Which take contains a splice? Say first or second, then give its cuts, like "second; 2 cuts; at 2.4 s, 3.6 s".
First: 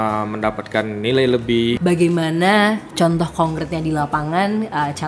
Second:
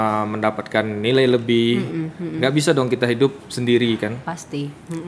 first; 1 cut; at 1.8 s